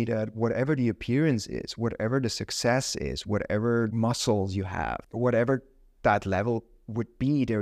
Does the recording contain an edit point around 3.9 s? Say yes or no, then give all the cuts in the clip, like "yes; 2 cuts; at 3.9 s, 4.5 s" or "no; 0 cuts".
yes; 2 cuts; at 3.9 s, 5.0 s